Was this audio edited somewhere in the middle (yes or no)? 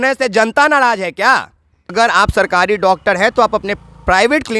yes